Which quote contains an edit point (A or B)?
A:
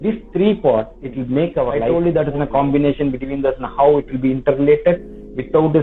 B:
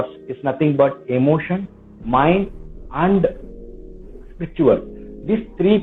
A